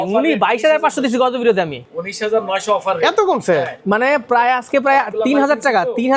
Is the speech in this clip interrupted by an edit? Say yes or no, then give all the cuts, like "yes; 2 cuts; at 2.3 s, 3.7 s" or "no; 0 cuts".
no; 0 cuts